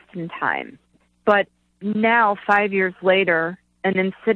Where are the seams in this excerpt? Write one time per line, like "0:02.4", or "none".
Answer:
none